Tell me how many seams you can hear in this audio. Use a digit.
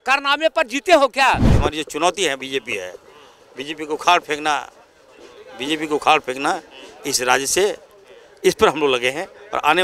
1